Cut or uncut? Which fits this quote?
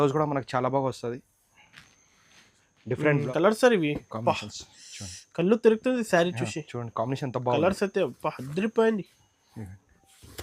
cut